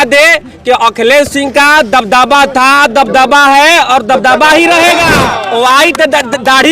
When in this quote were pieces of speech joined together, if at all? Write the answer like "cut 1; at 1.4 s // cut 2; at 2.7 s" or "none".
cut 1; at 5.3 s